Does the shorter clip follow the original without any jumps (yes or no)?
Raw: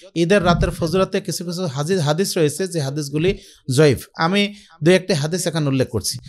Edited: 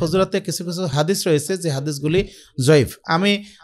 no